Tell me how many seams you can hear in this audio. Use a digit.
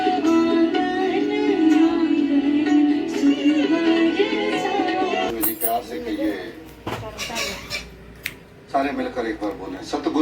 0